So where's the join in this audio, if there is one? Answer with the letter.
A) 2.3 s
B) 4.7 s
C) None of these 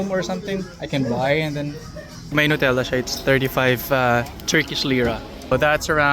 A